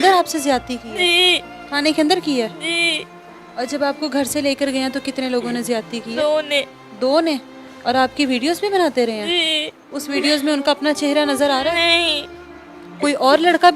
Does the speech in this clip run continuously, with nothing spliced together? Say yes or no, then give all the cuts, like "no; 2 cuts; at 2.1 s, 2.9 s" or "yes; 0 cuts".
yes; 0 cuts